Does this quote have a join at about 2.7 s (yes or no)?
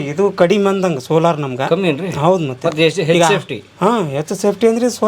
no